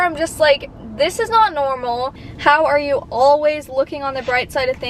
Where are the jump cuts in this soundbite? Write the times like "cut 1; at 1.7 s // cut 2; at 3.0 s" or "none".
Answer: cut 1; at 2.2 s